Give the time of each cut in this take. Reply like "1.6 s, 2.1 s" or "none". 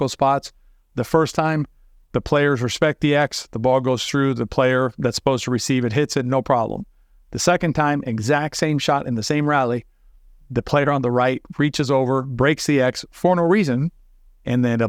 none